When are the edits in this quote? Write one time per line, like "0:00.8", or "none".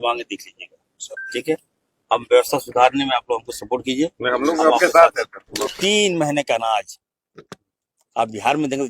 0:05.7